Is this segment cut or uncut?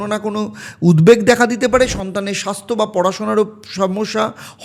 uncut